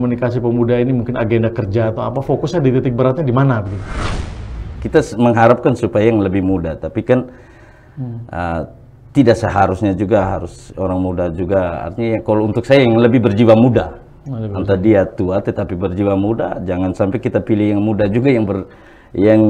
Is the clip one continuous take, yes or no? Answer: no